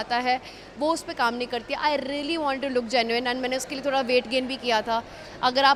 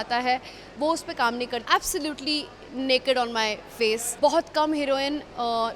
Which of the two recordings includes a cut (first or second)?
second